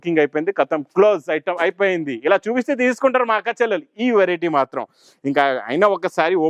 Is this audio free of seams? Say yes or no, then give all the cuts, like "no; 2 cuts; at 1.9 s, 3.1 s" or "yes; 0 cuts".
yes; 0 cuts